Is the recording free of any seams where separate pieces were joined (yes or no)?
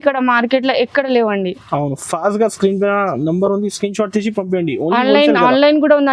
yes